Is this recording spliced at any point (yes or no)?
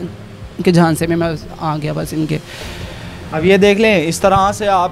no